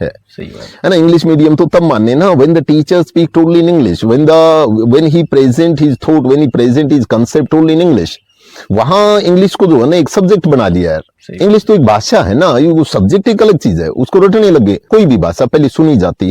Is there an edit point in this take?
yes; 1 cut; at 14.9 s

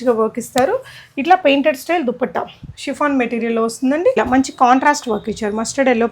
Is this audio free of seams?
no; 1 cut; at 4.1 s

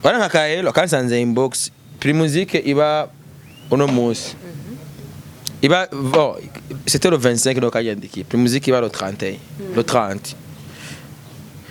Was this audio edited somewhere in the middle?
no; 0 cuts

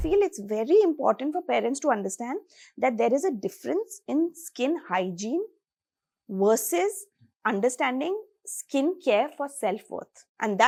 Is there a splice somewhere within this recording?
no; 0 cuts

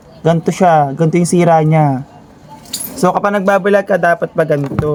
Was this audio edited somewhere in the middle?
no; 0 cuts

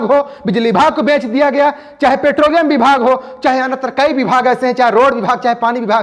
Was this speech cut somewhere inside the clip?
no; 0 cuts

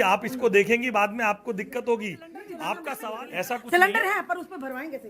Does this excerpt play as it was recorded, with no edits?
no; 1 cut; at 3.0 s

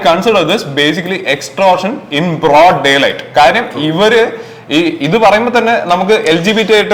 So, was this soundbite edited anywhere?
no; 0 cuts

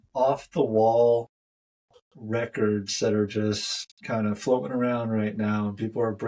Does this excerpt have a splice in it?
no; 0 cuts

